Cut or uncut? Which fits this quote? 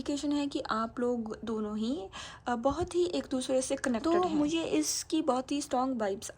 cut